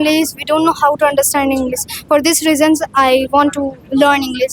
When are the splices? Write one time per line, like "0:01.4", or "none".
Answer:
none